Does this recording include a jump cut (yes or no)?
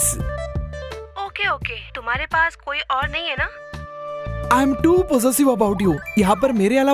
no